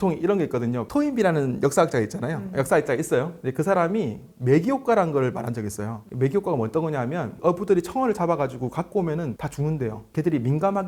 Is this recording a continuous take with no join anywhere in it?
yes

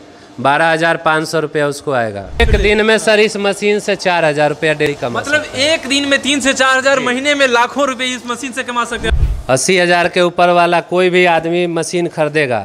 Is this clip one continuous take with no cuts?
no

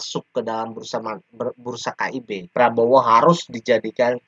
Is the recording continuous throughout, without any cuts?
no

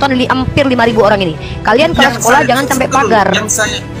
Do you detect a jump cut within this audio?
no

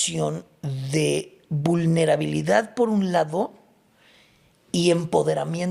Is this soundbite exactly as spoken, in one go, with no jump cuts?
yes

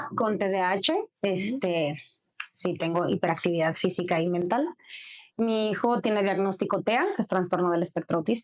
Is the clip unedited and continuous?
yes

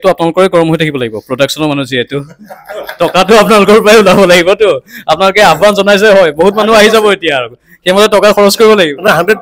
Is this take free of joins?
yes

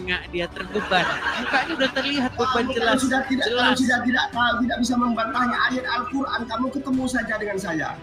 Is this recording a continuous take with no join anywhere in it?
no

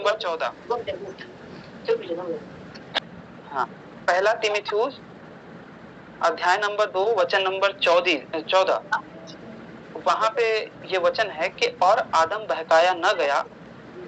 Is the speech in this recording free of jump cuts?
no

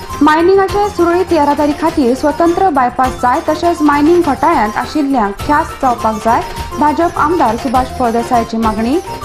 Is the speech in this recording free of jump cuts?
yes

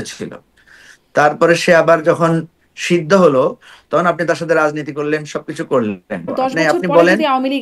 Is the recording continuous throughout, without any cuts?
no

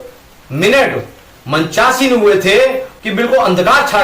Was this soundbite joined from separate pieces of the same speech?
yes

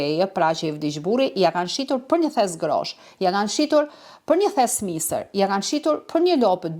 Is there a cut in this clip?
no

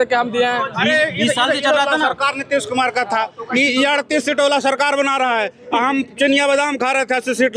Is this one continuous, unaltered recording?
yes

